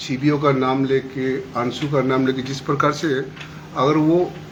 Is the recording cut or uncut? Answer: uncut